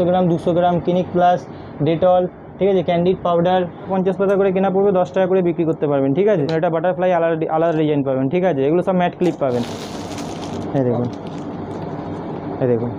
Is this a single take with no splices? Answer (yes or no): no